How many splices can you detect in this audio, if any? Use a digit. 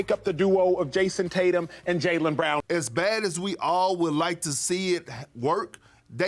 1